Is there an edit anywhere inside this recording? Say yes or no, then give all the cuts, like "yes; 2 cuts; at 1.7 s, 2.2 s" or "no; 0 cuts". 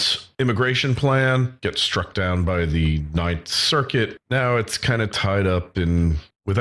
yes; 1 cut; at 2.3 s